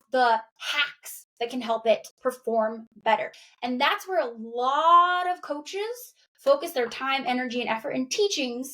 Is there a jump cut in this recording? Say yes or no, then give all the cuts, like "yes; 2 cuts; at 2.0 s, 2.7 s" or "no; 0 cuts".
yes; 1 cut; at 3.4 s